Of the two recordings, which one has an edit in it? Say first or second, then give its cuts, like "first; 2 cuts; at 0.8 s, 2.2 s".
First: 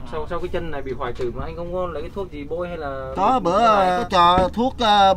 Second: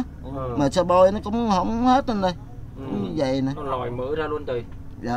first; 1 cut; at 4.0 s